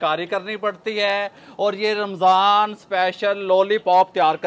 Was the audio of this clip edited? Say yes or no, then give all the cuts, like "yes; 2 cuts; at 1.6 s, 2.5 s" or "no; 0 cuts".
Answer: no; 0 cuts